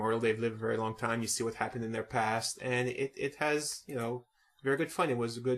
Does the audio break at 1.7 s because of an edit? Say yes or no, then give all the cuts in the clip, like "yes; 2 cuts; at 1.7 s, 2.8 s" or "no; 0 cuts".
no; 1 cut; at 3.0 s